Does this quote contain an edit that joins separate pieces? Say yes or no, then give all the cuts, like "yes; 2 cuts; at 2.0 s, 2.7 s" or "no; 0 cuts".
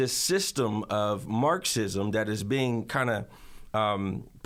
no; 0 cuts